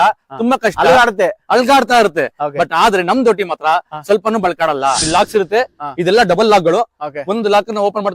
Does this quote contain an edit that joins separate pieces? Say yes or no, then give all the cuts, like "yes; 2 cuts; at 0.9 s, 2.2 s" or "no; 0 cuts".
yes; 1 cut; at 5.0 s